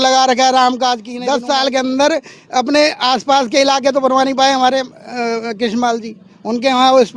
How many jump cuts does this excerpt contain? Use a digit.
1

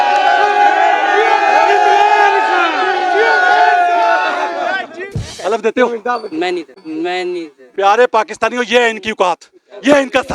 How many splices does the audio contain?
1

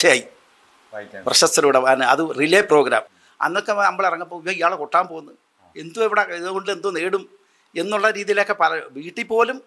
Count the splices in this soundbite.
1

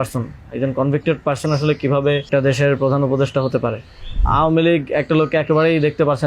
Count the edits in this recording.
2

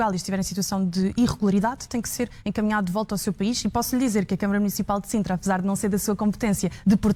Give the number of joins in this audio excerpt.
0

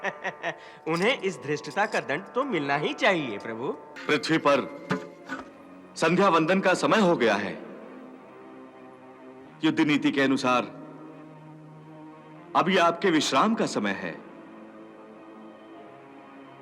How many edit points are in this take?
1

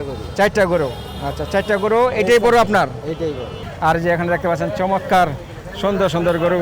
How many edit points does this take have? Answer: 1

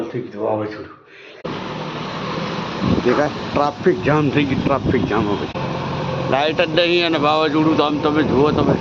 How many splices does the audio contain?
2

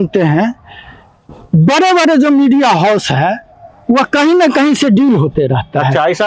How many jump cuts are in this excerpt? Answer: 0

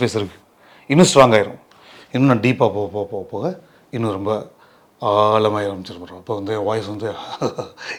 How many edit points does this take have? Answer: 0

